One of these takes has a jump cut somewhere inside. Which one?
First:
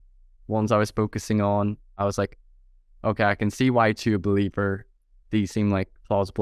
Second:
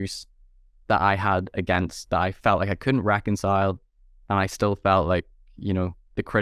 first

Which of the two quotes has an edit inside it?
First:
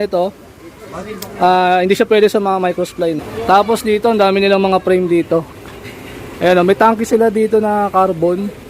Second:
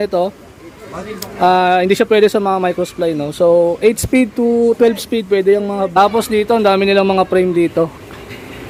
first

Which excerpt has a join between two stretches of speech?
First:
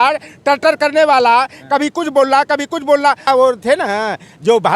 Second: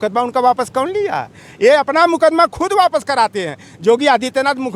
first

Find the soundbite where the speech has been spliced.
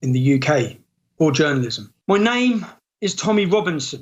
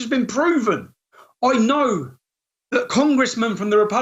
first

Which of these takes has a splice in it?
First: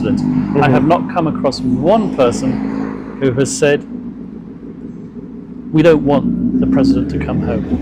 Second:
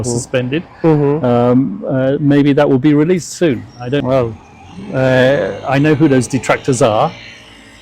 second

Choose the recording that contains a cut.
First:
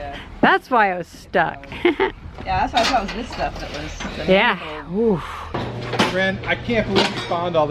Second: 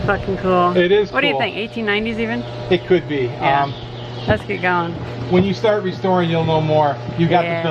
first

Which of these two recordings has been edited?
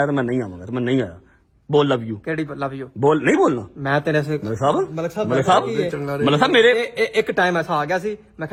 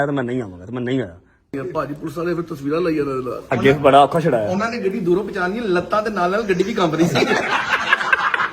second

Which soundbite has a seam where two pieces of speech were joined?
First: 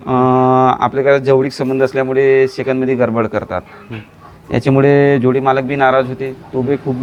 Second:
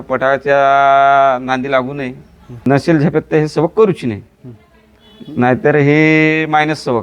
second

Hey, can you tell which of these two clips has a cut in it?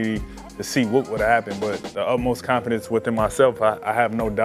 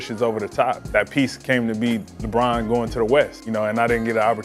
second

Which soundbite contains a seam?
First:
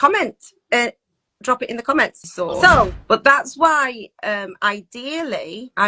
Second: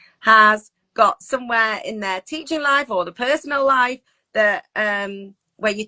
first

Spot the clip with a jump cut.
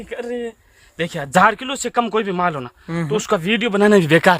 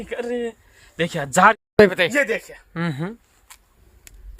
second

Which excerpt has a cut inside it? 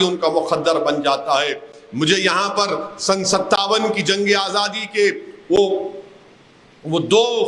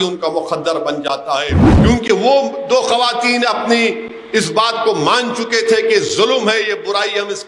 second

